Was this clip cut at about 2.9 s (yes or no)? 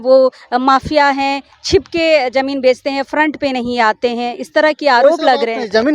no